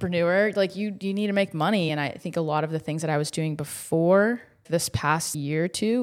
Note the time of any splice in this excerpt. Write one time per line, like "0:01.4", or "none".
0:01.9
0:05.0

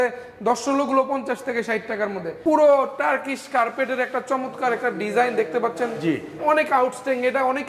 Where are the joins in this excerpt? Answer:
0:02.3

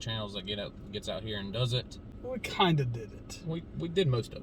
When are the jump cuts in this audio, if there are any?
0:02.1

